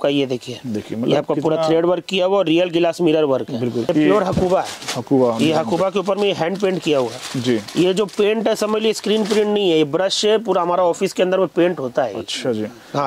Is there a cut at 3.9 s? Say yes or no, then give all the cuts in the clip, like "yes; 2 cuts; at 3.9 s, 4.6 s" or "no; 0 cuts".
yes; 1 cut; at 3.9 s